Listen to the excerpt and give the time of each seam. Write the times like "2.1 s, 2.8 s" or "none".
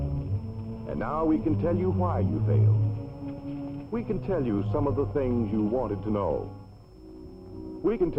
5.5 s